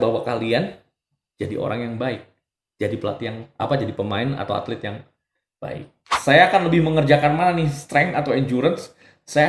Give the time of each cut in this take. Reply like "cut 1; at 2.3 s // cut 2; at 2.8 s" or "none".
cut 1; at 6.0 s

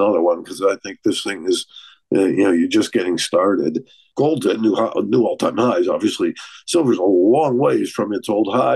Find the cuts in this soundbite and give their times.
none

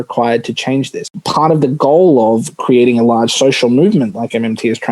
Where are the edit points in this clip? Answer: cut 1; at 1.1 s

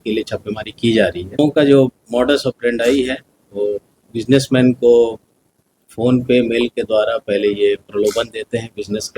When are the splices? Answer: cut 1; at 1.4 s

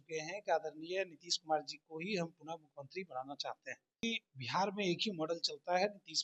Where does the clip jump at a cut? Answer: cut 1; at 4.0 s

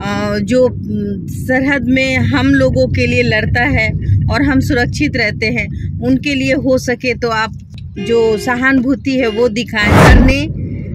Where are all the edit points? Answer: cut 1; at 10.0 s

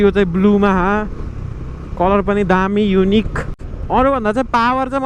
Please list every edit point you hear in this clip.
none

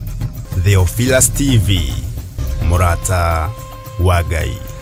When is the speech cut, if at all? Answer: none

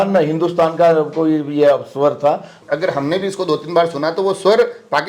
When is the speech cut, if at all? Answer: cut 1; at 2.5 s

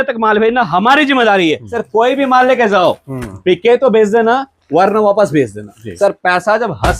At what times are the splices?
cut 1; at 1.7 s // cut 2; at 5.8 s

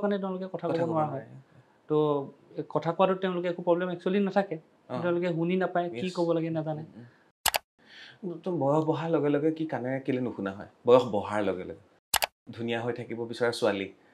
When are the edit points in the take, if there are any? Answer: cut 1; at 7.6 s // cut 2; at 12.1 s

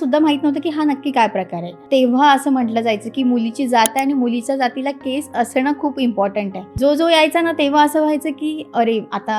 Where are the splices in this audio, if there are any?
cut 1; at 1.8 s // cut 2; at 6.7 s

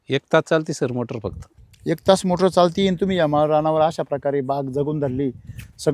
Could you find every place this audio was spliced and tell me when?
cut 1; at 1.4 s

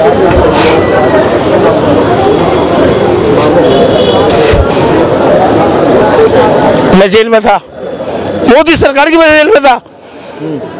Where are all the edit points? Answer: none

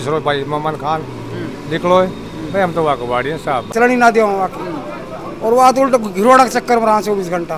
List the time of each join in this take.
cut 1; at 3.7 s

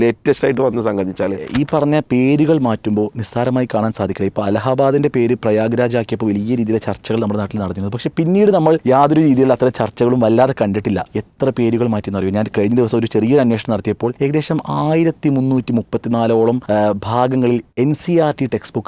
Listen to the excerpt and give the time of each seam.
cut 1; at 1.4 s // cut 2; at 8.8 s // cut 3; at 11.2 s // cut 4; at 14.2 s // cut 5; at 16.6 s // cut 6; at 17.7 s

